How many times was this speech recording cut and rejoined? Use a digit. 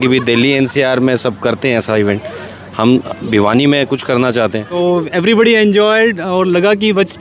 1